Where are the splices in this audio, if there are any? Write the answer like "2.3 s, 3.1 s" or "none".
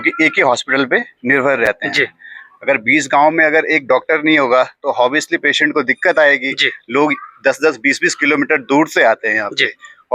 none